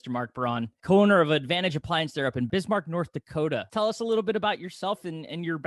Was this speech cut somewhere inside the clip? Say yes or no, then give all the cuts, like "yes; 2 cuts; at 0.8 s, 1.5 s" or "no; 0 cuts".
yes; 3 cuts; at 0.8 s, 2.5 s, 3.7 s